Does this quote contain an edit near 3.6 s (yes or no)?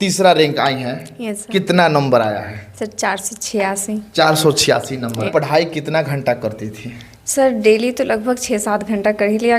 no